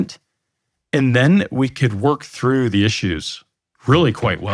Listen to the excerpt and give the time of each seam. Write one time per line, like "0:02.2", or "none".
none